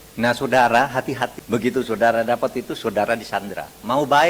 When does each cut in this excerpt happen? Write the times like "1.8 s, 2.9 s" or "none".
1.3 s

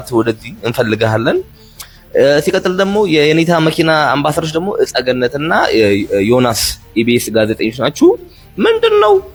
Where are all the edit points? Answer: none

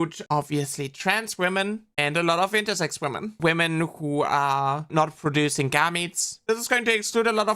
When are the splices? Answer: 3.3 s, 4.8 s, 6.3 s

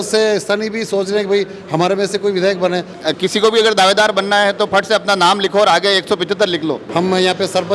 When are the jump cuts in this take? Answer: 2.9 s, 6.8 s

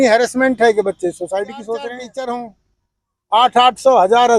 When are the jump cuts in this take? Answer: 1.8 s

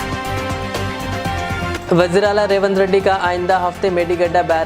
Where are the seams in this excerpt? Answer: 1.7 s

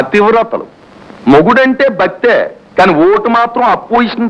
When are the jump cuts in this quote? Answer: none

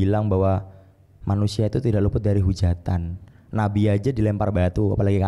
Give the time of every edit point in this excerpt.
none

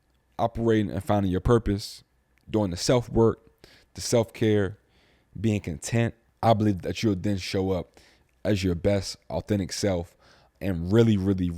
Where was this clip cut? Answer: 6.2 s, 10.4 s

